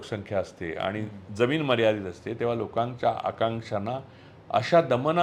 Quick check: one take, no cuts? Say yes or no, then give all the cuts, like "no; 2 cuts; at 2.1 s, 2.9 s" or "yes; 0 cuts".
yes; 0 cuts